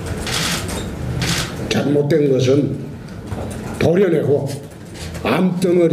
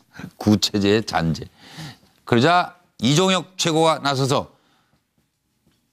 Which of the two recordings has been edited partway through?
first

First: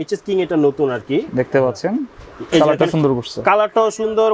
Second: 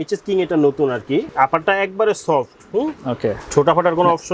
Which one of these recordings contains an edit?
second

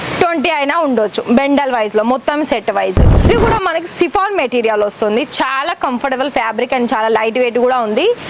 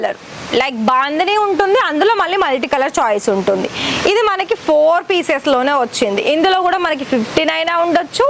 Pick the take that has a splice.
first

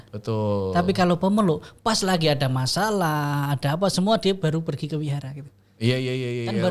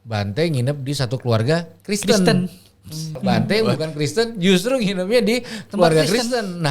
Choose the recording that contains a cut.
second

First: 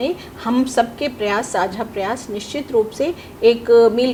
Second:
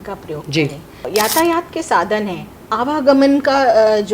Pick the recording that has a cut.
second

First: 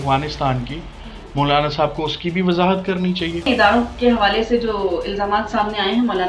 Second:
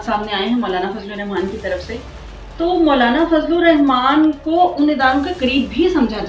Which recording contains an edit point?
first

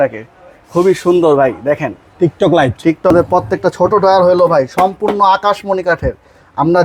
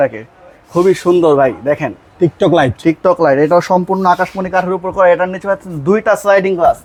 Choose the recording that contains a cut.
first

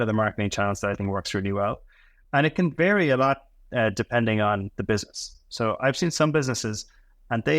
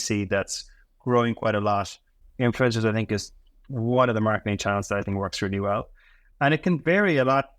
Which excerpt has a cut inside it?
second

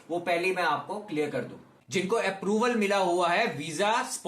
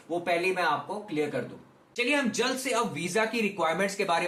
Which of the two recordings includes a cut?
first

